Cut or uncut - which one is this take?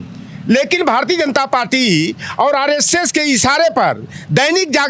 uncut